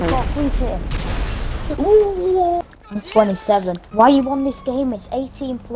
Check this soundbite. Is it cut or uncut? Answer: cut